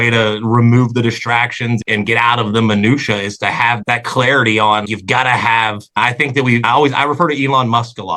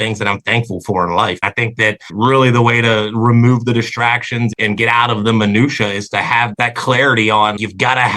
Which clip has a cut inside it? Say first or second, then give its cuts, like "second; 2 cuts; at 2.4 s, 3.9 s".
second; 1 cut; at 1.4 s